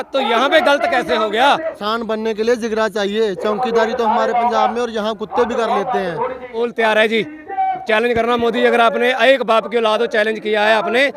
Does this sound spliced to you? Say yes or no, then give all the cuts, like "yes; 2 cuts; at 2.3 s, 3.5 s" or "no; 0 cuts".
yes; 2 cuts; at 1.8 s, 6.4 s